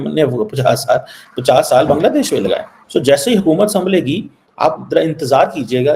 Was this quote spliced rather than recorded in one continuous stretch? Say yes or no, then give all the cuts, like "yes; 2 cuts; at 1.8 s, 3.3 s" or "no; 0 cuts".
yes; 1 cut; at 2.7 s